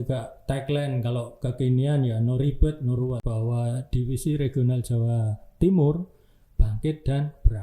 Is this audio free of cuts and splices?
no; 1 cut; at 3.2 s

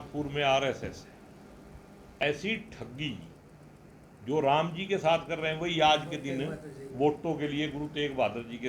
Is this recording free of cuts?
no; 1 cut; at 2.2 s

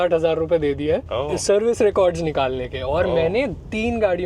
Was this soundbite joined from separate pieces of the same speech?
yes; 1 cut; at 1.1 s

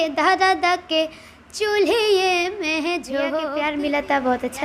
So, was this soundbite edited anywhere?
yes; 1 cut; at 3.6 s

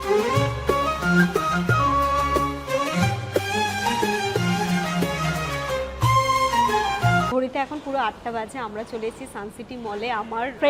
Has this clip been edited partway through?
yes; 1 cut; at 7.3 s

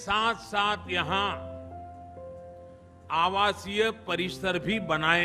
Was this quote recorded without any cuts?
yes; 0 cuts

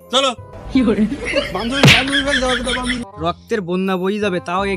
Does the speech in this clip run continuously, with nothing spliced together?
no; 1 cut; at 3.0 s

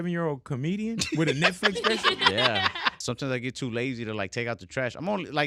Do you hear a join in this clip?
yes; 1 cut; at 2.9 s

